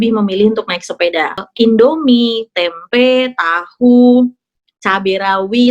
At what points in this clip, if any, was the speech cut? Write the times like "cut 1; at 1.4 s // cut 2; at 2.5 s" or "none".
cut 1; at 1.4 s

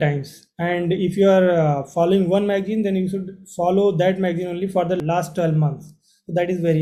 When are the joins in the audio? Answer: none

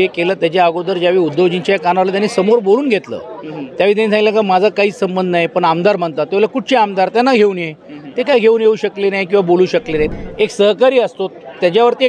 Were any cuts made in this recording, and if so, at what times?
cut 1; at 10.1 s

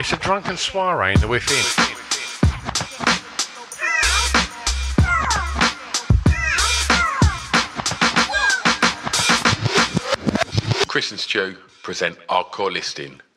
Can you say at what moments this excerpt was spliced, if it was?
none

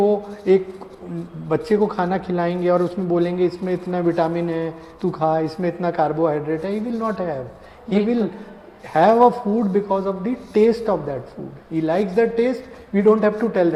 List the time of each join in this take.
none

